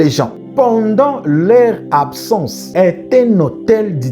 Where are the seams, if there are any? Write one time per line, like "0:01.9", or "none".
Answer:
0:02.6